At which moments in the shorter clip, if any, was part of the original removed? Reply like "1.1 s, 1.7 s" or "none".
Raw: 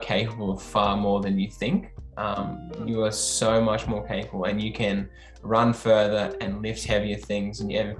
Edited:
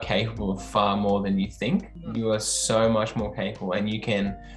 2.0 s